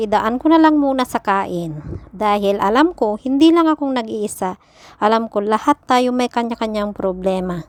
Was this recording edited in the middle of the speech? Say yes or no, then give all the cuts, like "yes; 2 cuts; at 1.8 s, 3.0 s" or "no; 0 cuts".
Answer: no; 0 cuts